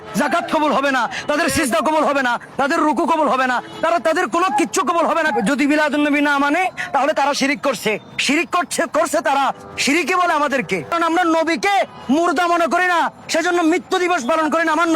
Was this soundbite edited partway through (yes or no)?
yes